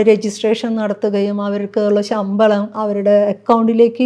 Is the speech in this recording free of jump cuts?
no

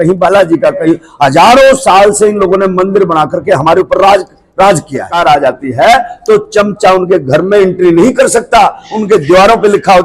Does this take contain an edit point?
yes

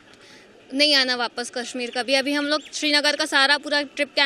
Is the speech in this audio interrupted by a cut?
no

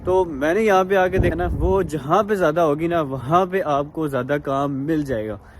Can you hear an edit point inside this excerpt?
yes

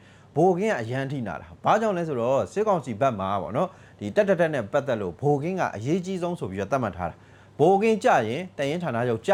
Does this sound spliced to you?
no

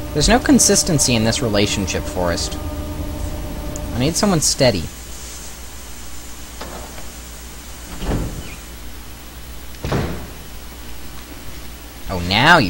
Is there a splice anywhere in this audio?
yes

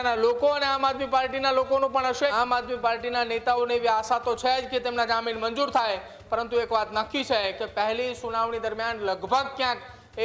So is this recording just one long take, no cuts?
no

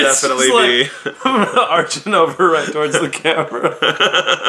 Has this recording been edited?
no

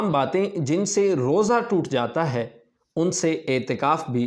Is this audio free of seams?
yes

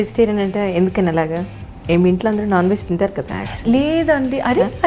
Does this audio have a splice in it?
no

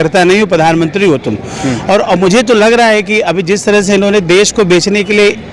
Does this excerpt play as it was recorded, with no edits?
yes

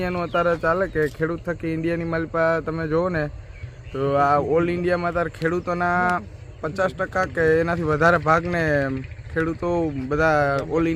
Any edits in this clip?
no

